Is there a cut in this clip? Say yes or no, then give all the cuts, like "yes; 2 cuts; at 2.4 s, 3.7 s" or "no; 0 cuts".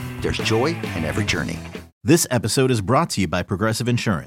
yes; 1 cut; at 1.9 s